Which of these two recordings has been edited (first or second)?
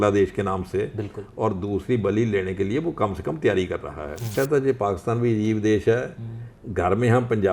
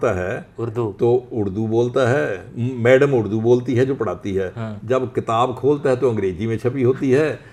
first